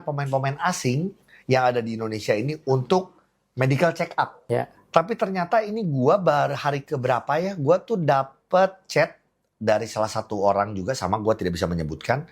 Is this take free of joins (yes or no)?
no